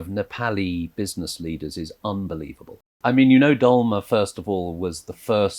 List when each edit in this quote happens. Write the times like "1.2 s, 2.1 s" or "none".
3.0 s